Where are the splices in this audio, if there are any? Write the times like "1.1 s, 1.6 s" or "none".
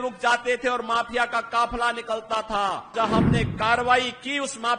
2.9 s